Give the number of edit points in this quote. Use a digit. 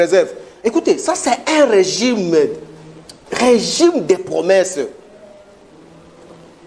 0